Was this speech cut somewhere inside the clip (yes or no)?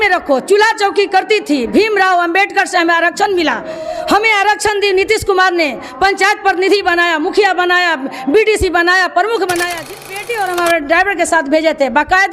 yes